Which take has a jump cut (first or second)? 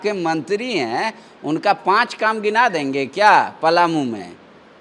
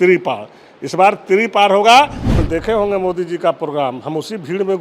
second